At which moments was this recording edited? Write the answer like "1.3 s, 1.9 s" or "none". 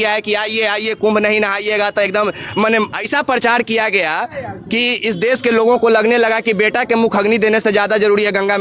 none